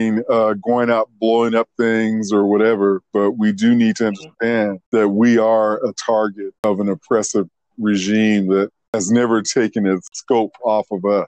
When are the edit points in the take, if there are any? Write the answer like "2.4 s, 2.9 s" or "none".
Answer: 4.8 s, 6.6 s, 8.9 s, 10.1 s